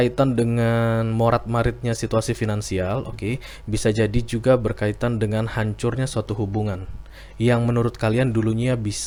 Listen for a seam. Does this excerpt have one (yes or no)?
no